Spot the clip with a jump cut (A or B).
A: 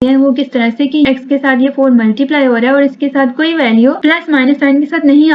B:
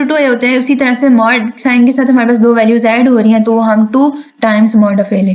A